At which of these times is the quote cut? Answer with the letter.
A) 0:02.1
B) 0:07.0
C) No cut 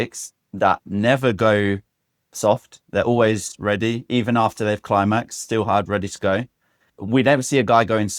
B